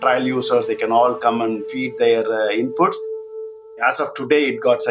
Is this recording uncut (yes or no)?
no